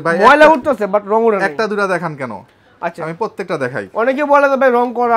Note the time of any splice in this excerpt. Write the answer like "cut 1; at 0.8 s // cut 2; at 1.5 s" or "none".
none